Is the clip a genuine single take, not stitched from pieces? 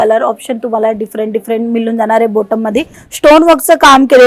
no; 1 cut; at 3.0 s

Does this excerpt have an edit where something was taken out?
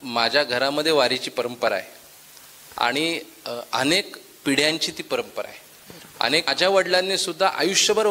yes; 1 cut; at 6.5 s

